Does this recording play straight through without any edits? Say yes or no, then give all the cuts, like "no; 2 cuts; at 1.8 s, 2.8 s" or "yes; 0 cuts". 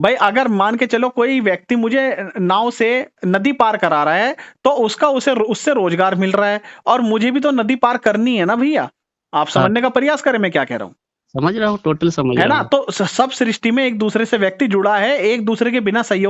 yes; 0 cuts